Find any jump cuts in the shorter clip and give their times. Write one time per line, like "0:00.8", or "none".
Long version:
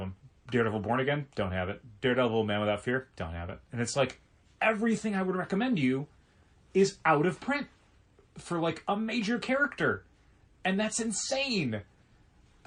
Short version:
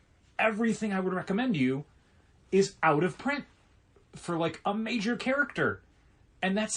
none

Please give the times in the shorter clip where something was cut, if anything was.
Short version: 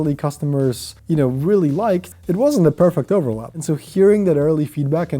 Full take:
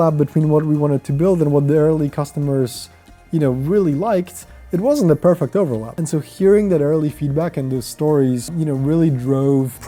0:00.9
0:02.1

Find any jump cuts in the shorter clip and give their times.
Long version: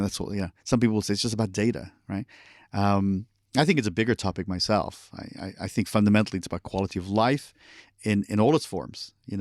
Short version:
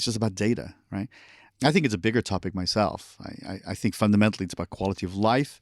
0:01.4

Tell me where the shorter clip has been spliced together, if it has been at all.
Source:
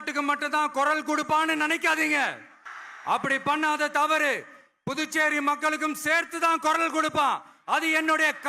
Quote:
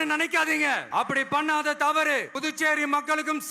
0:00.8
0:02.3

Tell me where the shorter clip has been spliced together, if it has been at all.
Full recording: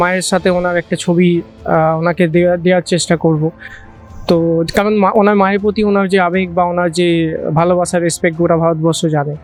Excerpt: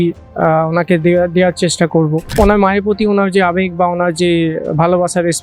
0:02.3

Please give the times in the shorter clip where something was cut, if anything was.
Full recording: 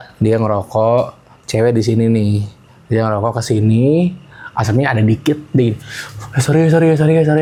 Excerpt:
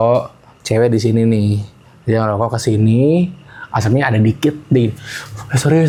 none

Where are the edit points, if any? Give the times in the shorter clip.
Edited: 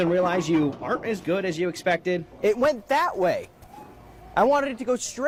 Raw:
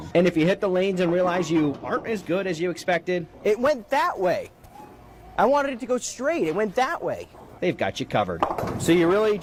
none

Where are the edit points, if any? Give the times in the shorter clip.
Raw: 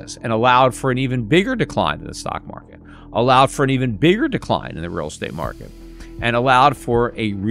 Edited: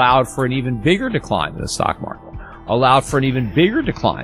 none

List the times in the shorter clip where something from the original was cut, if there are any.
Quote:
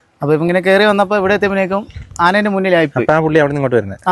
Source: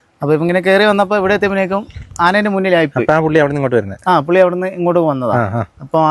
none

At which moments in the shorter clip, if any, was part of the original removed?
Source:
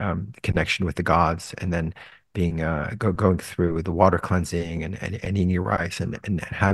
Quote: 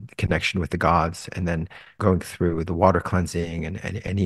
0:02.0

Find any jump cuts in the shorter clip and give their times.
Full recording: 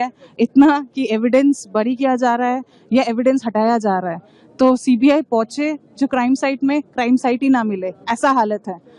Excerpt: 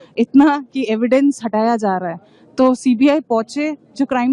0:01.4

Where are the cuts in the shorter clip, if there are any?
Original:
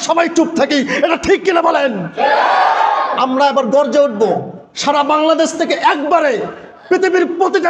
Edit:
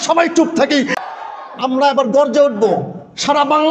0:01.1

